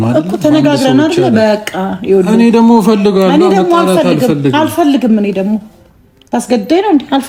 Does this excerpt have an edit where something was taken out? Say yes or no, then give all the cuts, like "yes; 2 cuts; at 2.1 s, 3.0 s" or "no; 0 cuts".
no; 0 cuts